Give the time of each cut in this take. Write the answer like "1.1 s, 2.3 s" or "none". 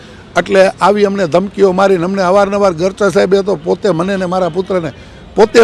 none